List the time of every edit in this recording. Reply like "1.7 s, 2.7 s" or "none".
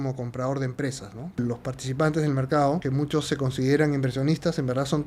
1.4 s, 2.8 s